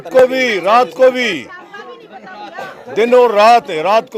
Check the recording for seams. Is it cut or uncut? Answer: uncut